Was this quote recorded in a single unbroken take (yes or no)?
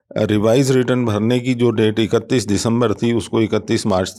yes